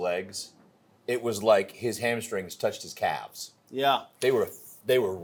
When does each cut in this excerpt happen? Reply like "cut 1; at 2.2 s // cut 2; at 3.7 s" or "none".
none